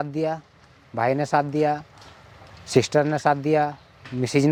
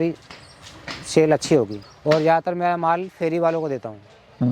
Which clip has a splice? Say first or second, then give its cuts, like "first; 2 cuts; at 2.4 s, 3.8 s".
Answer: second; 1 cut; at 1.8 s